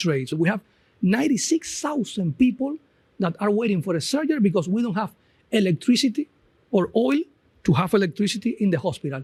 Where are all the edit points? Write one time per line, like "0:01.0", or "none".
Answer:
none